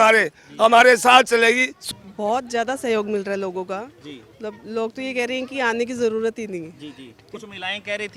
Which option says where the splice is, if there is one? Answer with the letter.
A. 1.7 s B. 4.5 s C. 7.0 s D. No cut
A